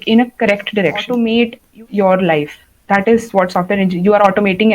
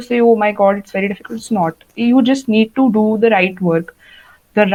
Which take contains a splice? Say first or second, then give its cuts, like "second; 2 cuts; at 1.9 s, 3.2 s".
first; 1 cut; at 1.1 s